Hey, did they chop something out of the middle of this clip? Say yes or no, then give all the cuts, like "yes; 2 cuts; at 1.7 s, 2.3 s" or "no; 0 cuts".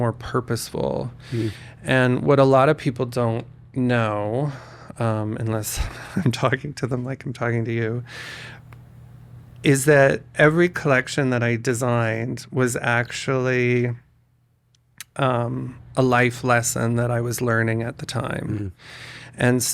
no; 0 cuts